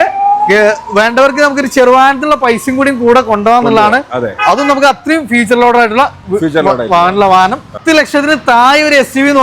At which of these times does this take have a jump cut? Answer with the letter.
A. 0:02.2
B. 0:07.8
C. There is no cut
B